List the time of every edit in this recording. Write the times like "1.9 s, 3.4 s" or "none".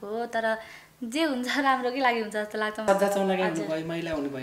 2.8 s